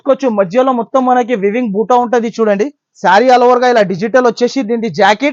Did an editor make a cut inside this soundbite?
no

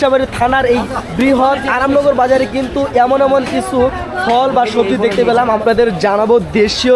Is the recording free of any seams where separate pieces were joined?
no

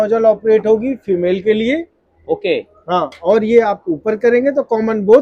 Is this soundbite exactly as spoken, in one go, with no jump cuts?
yes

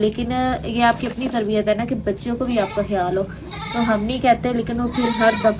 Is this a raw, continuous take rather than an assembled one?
yes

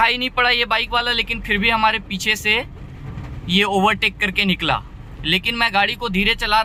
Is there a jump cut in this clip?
no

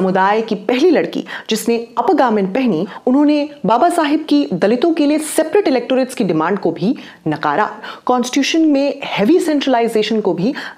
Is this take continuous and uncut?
no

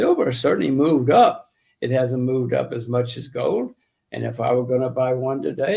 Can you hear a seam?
no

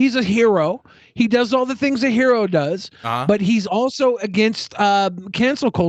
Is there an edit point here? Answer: no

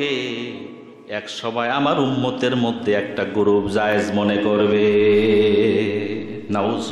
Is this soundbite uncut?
yes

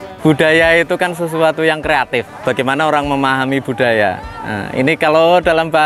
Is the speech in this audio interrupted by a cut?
yes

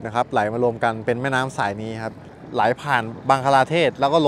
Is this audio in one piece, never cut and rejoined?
yes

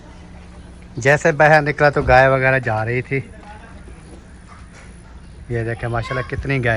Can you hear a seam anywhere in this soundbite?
no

